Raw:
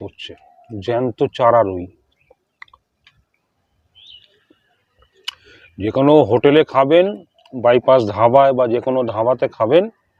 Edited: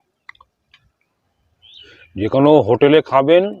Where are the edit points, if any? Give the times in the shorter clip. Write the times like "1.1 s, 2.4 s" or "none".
1.8 s